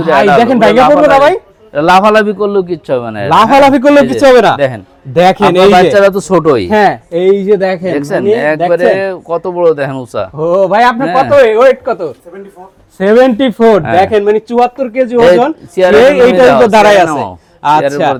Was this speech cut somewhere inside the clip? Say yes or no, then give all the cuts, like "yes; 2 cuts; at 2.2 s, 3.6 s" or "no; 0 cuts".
no; 0 cuts